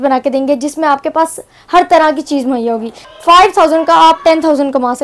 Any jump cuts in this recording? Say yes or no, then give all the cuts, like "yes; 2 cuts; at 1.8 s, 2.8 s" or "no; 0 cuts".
yes; 1 cut; at 2.9 s